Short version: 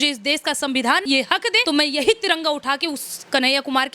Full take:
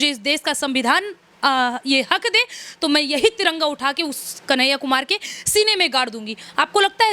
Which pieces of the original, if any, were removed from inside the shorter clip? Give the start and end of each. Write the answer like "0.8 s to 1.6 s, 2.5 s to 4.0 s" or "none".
1.3 s to 2.5 s